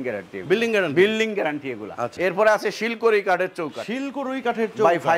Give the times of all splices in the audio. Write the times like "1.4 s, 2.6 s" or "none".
2.1 s